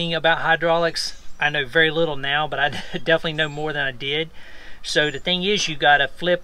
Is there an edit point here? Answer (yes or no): no